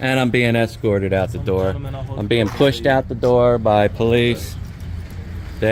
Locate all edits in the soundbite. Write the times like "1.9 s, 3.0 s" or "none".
none